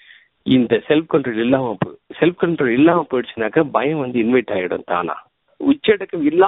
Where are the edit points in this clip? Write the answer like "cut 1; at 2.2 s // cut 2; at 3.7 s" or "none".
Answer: cut 1; at 5.5 s